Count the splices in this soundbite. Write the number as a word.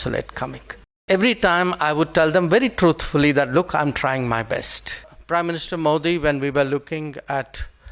two